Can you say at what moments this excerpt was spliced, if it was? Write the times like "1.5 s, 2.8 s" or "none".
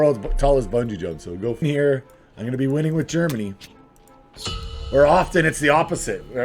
1.6 s